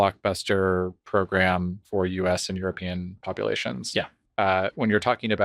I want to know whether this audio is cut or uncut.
uncut